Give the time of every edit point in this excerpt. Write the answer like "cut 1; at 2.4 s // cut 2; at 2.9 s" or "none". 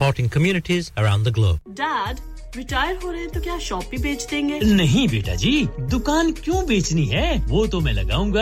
cut 1; at 1.6 s